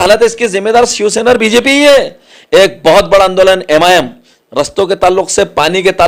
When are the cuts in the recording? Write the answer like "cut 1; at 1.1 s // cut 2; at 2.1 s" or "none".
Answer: cut 1; at 2.3 s